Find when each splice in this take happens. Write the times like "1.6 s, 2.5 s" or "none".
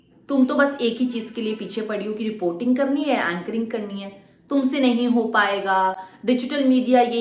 none